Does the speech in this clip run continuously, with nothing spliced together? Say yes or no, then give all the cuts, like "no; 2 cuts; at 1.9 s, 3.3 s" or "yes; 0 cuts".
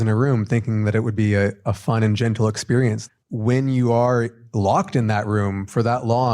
no; 2 cuts; at 3.0 s, 4.4 s